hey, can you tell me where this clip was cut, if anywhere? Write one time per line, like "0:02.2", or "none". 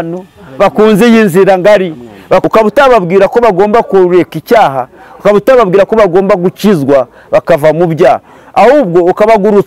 0:02.4